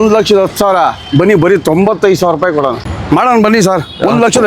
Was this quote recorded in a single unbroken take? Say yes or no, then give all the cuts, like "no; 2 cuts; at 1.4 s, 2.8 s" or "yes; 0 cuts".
no; 1 cut; at 2.9 s